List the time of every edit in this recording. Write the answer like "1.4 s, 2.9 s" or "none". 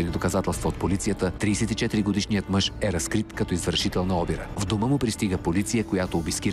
1.3 s